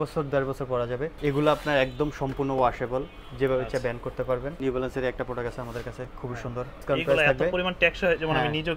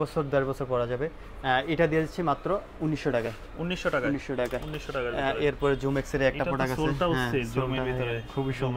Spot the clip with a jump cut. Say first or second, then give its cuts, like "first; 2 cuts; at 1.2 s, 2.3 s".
first; 3 cuts; at 1.1 s, 4.5 s, 6.8 s